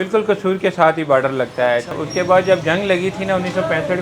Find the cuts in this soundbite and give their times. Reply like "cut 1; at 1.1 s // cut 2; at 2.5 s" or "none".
cut 1; at 1.9 s

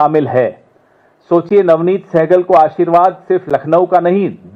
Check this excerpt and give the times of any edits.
none

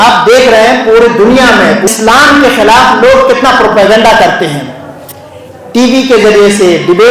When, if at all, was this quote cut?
cut 1; at 1.9 s

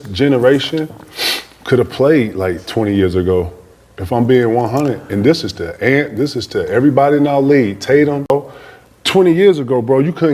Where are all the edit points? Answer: cut 1; at 8.3 s

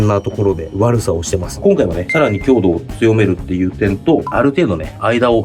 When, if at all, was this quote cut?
cut 1; at 1.6 s

